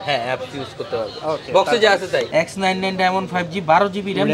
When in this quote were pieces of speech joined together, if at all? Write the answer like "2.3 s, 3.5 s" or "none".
2.3 s